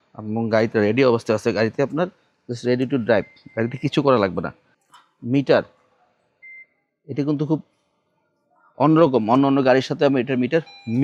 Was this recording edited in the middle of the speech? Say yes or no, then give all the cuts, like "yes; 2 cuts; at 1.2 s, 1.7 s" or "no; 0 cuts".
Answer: no; 0 cuts